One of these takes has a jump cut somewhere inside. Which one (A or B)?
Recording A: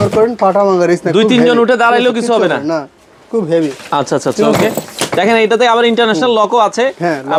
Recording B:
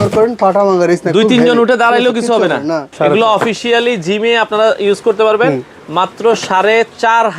B